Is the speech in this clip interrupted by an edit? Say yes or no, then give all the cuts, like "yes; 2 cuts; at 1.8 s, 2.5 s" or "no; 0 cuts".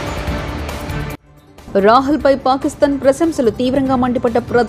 yes; 1 cut; at 1.1 s